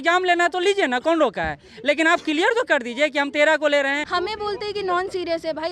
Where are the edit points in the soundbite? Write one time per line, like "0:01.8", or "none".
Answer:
0:04.1